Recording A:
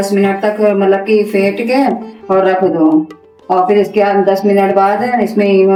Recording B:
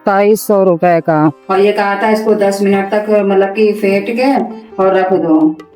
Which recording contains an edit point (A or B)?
B